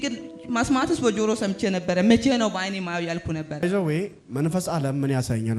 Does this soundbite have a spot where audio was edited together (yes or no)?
no